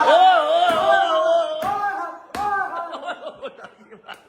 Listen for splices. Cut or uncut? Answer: uncut